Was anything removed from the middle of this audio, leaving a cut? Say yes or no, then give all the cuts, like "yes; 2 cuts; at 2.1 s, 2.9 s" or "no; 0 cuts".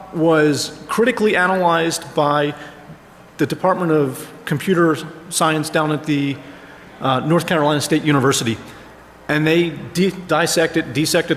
no; 0 cuts